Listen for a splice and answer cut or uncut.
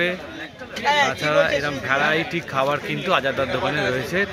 uncut